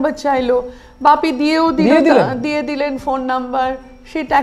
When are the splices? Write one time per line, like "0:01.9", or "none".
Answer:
none